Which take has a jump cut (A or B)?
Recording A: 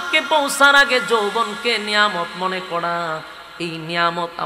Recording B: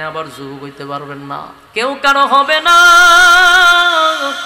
B